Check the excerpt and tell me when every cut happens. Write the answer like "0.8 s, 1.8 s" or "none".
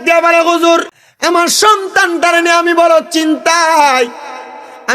1.0 s